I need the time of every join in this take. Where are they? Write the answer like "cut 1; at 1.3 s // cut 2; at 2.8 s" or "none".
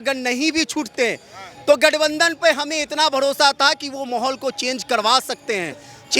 none